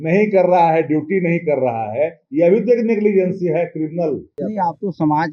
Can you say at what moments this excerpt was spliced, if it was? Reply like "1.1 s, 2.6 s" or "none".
4.4 s